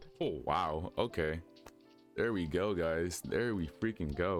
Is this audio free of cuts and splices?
yes; 0 cuts

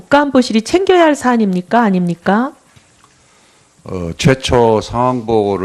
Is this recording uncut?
yes; 0 cuts

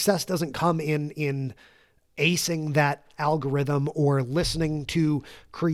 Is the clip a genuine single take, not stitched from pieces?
yes; 0 cuts

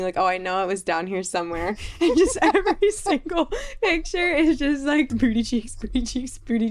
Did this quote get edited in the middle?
yes; 1 cut; at 5.1 s

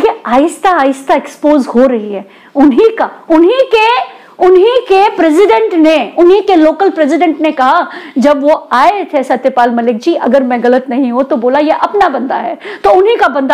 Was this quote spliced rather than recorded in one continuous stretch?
no; 0 cuts

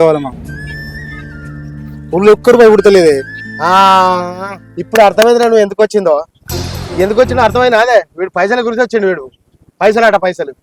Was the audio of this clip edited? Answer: no; 0 cuts

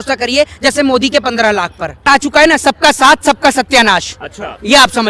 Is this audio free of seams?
no; 1 cut; at 2.1 s

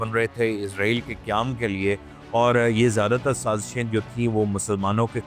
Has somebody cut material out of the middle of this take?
no; 0 cuts

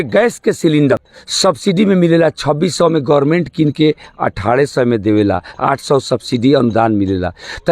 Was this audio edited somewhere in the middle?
yes; 1 cut; at 0.9 s

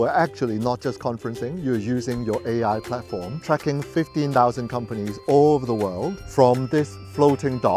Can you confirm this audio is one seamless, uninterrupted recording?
no; 2 cuts; at 3.3 s, 6.2 s

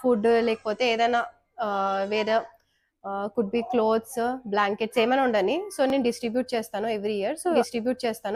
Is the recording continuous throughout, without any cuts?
yes; 0 cuts

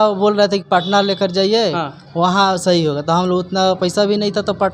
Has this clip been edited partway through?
no; 0 cuts

